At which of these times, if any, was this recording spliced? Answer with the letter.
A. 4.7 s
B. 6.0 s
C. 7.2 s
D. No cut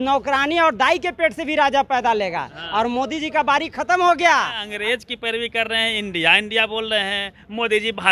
A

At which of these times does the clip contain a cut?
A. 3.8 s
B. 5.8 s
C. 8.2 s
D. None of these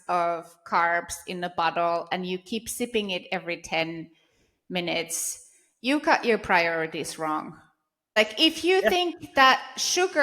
C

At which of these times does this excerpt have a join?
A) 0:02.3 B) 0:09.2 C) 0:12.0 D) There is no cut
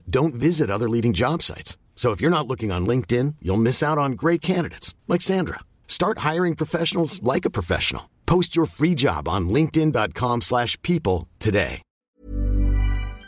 C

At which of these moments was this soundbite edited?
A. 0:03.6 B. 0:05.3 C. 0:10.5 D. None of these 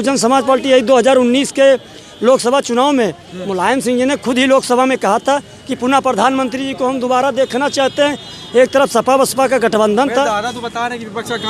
D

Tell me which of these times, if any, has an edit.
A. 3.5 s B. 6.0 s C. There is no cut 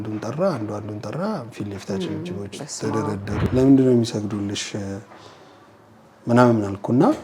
A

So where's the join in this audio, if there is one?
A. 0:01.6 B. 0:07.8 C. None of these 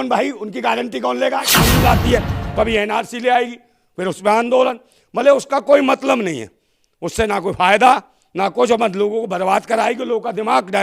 A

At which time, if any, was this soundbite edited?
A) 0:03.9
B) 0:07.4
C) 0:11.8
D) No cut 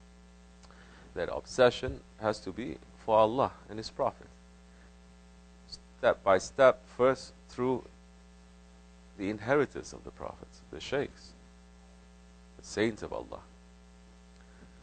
A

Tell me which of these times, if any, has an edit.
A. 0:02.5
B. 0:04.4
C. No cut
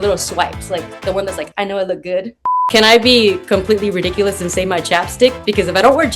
A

